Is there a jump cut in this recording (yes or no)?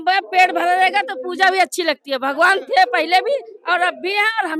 no